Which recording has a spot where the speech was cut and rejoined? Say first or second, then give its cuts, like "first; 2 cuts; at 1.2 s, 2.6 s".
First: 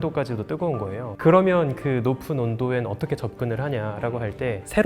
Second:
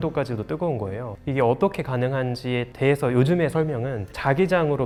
first; 1 cut; at 1.1 s